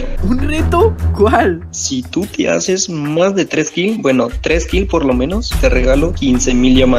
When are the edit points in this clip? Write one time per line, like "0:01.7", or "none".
none